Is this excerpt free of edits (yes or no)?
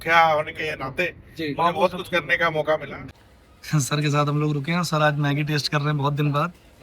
no